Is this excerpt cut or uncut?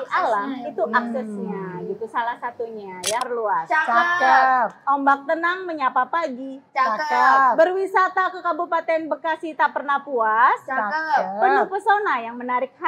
cut